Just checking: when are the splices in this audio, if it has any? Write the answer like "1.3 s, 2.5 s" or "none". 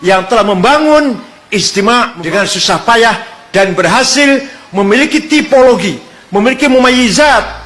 2.1 s